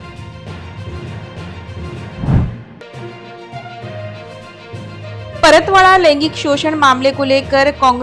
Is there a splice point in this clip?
no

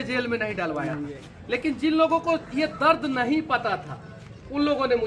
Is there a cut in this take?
no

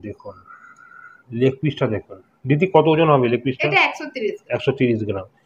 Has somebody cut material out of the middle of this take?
no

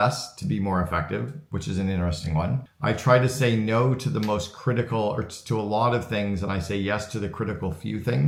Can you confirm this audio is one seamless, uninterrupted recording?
yes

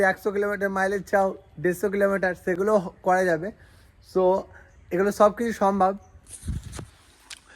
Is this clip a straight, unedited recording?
yes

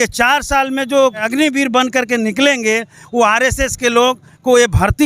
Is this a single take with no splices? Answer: no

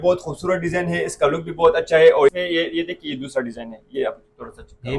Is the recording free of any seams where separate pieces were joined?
no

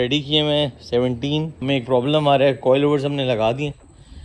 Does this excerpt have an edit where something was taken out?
yes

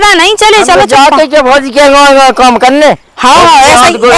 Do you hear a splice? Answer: no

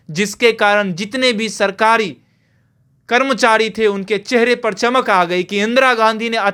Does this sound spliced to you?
no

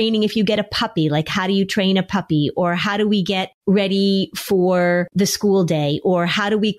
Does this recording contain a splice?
yes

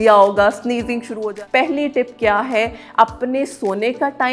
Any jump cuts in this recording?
yes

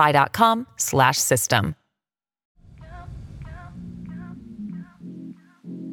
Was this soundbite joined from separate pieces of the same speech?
yes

